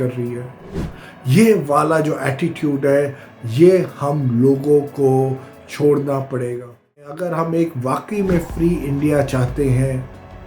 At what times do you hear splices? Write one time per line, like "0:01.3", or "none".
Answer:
0:07.1